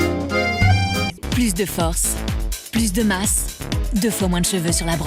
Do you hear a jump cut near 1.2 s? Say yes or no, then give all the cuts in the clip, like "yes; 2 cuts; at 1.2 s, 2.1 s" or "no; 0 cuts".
yes; 1 cut; at 1.2 s